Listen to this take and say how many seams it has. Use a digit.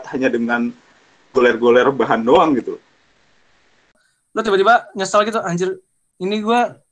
1